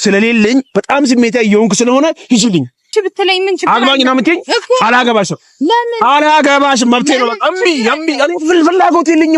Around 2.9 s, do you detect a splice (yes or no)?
yes